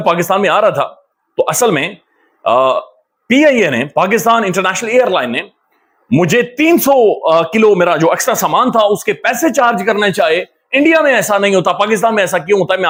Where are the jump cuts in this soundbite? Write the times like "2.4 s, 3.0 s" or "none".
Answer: none